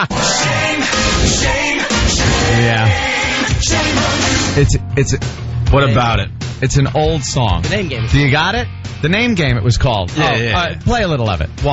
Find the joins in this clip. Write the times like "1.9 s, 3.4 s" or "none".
1.4 s